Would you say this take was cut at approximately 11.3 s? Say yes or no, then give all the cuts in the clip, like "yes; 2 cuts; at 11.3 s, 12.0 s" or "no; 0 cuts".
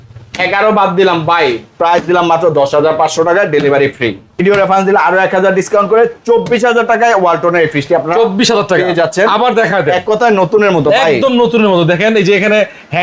no; 1 cut; at 4.3 s